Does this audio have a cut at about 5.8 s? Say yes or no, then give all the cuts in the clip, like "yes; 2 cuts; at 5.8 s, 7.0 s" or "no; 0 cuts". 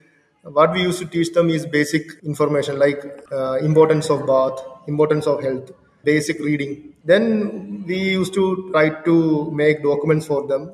yes; 4 cuts; at 3.1 s, 5.8 s, 6.9 s, 8.6 s